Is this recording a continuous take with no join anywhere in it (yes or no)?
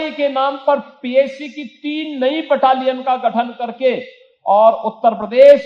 yes